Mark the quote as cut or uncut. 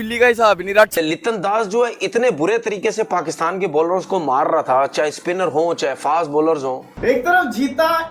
cut